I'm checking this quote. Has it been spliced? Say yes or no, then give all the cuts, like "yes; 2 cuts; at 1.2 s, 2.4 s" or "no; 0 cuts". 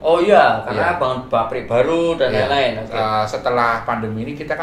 no; 0 cuts